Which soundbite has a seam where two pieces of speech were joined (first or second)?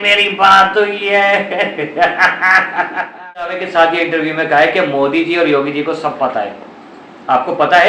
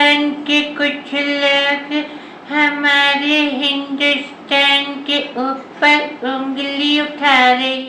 first